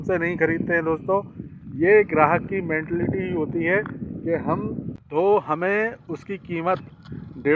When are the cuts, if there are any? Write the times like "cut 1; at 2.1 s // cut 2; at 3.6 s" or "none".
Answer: cut 1; at 4.9 s